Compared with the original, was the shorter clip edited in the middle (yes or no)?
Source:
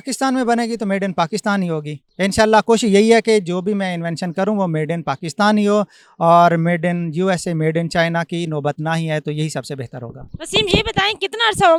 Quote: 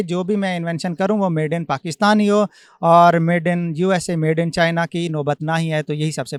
no